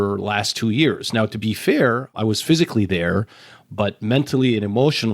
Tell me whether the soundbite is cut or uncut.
cut